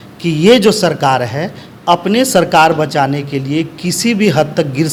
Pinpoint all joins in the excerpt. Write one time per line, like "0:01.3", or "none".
none